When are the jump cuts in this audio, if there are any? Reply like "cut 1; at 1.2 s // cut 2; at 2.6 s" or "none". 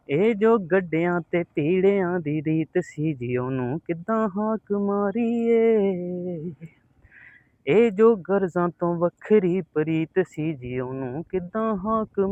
none